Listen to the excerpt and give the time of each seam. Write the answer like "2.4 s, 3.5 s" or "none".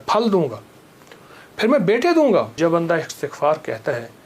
2.5 s